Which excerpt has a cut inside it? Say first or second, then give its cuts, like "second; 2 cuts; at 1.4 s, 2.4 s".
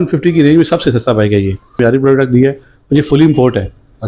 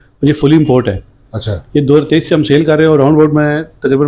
first; 1 cut; at 1.8 s